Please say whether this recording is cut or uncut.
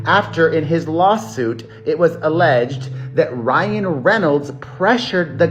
uncut